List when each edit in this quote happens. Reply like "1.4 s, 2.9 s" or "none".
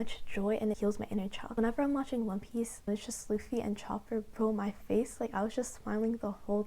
0.9 s, 2.9 s